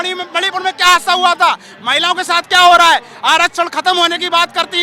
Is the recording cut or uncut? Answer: uncut